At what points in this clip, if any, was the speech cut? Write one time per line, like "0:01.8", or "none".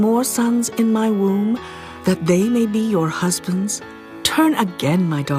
0:02.2